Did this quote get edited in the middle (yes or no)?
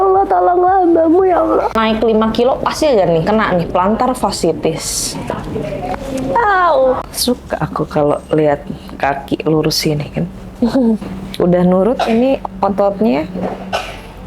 yes